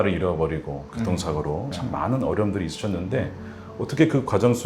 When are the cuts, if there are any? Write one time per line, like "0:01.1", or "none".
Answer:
0:01.7